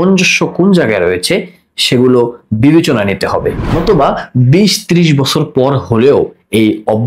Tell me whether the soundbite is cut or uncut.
uncut